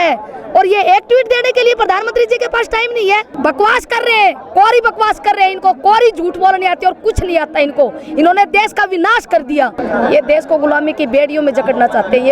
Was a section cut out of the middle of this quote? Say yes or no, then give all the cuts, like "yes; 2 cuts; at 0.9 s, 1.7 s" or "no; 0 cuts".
yes; 2 cuts; at 3.3 s, 9.8 s